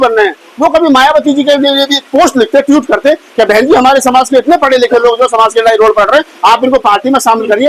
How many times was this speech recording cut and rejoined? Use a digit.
0